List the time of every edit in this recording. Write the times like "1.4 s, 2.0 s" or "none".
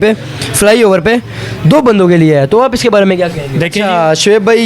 3.8 s